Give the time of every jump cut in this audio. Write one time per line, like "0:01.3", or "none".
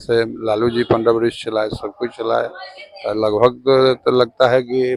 none

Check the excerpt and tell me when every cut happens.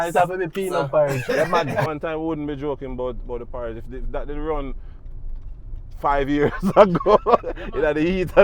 0:01.9

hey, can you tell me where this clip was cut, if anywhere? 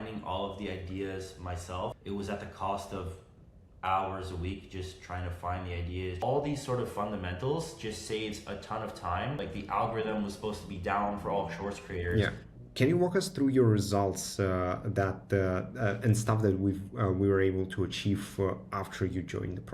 0:02.0
0:06.2
0:09.4
0:12.6

